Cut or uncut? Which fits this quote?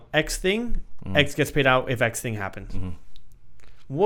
uncut